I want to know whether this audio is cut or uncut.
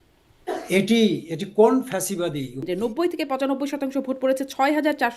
cut